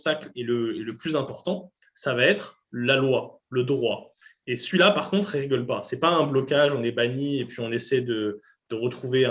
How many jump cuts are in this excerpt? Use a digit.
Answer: 0